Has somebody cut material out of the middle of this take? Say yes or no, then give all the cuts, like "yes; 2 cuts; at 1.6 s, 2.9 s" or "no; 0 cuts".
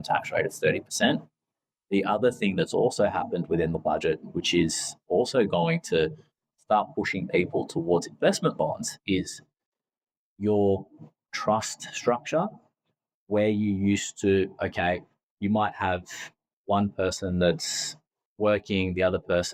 no; 0 cuts